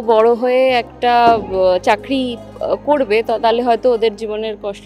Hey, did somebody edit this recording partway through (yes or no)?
no